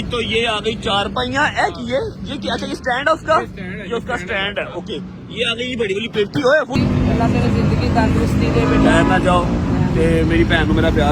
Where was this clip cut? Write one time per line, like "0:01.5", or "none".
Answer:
0:06.7